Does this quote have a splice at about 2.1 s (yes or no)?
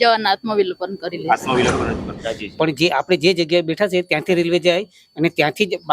yes